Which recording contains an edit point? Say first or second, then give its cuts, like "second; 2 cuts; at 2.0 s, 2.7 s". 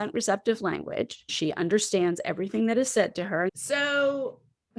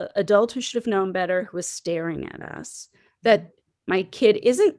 first; 1 cut; at 3.6 s